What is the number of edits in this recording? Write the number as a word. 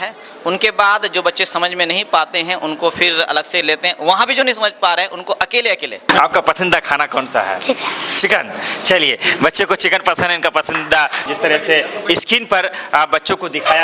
two